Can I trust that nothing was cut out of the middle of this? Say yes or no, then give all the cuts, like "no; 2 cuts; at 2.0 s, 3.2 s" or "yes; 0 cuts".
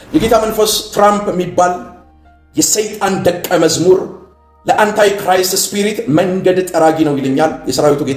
yes; 0 cuts